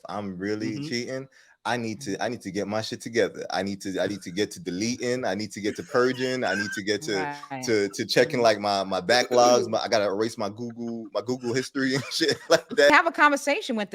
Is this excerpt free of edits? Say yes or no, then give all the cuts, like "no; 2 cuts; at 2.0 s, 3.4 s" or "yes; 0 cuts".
no; 1 cut; at 12.9 s